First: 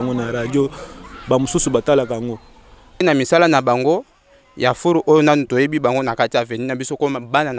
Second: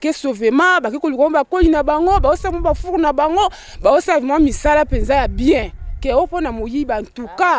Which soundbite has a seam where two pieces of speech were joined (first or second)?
first